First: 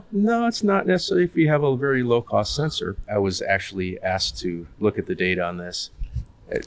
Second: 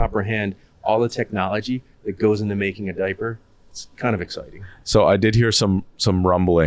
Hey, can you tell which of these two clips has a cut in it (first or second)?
first